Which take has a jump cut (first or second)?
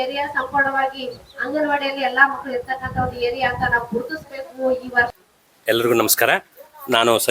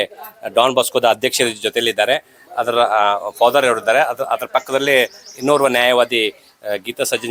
first